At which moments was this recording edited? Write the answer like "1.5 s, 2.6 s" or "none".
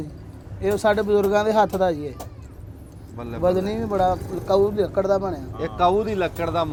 none